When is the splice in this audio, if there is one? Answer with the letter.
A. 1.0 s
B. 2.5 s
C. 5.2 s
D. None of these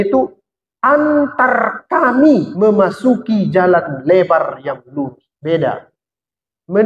B